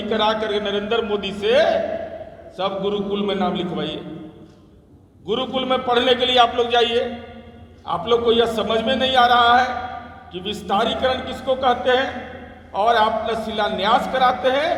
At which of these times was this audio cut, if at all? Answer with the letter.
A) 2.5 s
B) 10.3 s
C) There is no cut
C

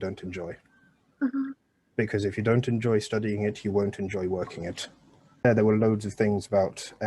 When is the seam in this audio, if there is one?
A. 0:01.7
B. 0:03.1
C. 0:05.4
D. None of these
C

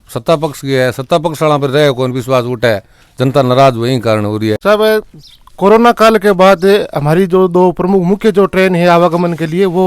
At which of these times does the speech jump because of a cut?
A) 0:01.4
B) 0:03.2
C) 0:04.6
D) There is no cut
C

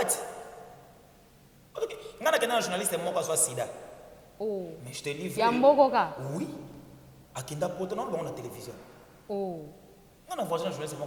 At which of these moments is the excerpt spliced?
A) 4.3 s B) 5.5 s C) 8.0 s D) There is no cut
D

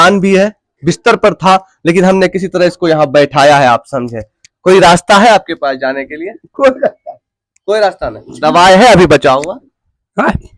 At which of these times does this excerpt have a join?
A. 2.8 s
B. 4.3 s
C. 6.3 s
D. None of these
D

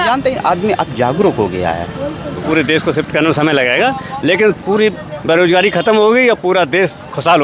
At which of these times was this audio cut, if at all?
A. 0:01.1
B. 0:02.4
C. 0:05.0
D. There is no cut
B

